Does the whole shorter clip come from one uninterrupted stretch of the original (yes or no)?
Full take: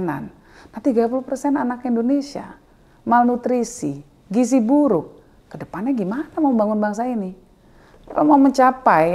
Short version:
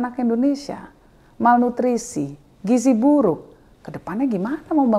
yes